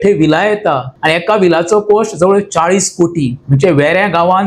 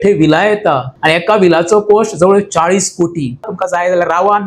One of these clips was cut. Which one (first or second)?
second